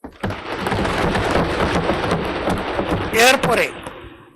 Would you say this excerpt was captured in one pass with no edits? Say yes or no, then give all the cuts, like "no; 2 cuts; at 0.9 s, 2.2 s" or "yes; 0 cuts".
yes; 0 cuts